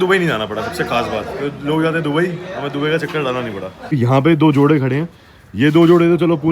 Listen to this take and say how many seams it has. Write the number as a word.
one